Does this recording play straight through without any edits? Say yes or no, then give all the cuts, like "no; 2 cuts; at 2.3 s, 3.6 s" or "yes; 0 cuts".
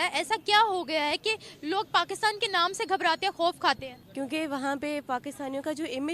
no; 1 cut; at 4.0 s